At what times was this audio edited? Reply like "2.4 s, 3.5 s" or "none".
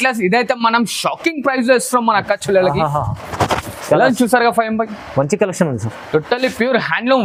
none

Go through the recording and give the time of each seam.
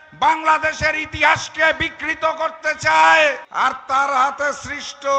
3.4 s

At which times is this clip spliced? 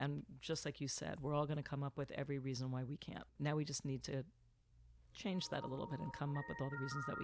3.3 s

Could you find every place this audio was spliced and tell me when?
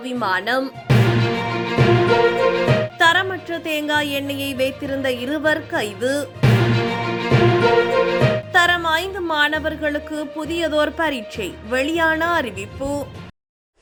none

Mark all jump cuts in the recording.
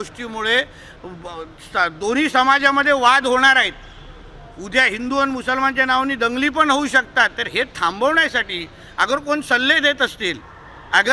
none

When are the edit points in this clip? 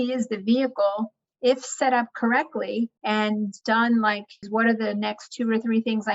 3.2 s, 4.4 s

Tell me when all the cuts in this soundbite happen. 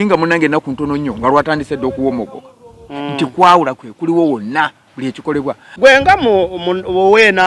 5.6 s

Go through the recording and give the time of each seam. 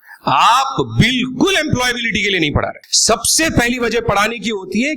2.9 s

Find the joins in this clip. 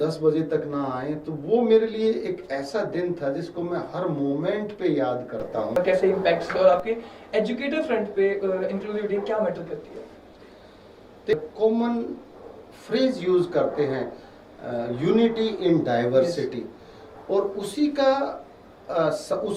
5.8 s, 11.3 s

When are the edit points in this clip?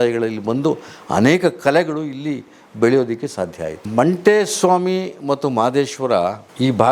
3.8 s

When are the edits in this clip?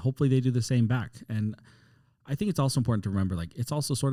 none

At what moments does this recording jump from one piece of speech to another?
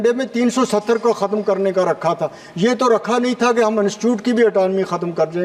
none

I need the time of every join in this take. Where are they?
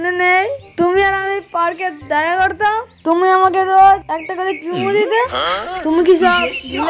none

